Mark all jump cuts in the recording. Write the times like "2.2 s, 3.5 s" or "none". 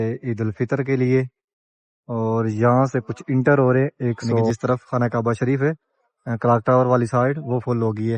4.5 s